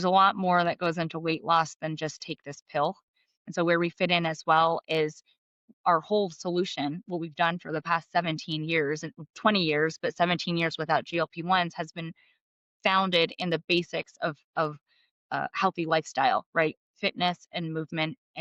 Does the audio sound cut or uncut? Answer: uncut